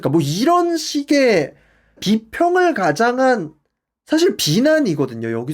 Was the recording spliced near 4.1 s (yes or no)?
no